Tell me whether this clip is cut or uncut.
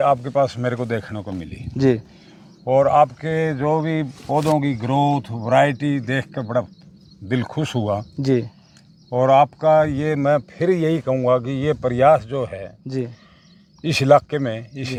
uncut